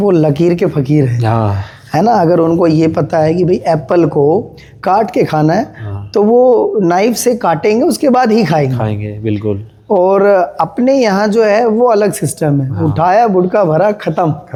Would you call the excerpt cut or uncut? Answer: uncut